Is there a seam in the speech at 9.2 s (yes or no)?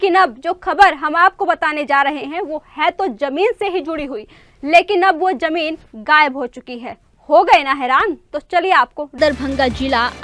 yes